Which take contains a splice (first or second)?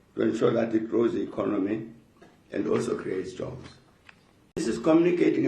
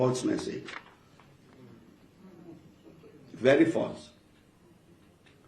first